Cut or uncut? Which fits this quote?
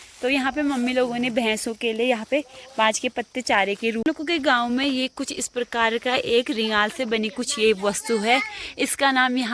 cut